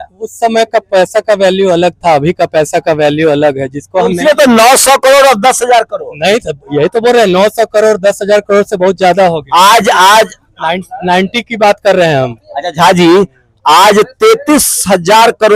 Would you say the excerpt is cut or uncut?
uncut